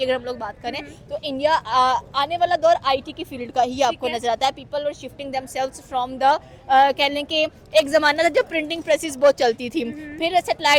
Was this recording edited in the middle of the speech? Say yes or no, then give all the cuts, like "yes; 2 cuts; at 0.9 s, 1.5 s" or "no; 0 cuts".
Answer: no; 0 cuts